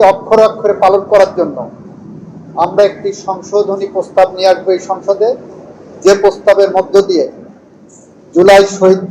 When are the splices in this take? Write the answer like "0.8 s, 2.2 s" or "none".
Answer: none

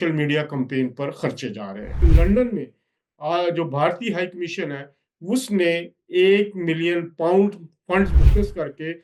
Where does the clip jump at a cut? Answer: 2.1 s

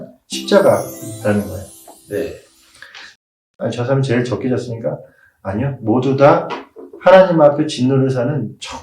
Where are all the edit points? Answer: 3.2 s

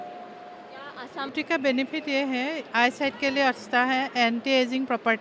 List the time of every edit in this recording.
1.3 s

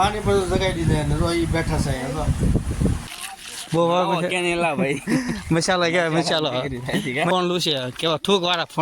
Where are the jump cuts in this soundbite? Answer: 3.1 s, 7.3 s

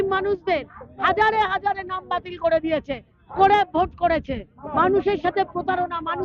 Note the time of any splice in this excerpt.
4.5 s

